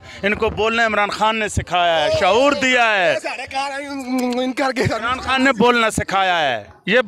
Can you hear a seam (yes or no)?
no